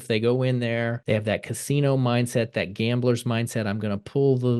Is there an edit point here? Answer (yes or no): yes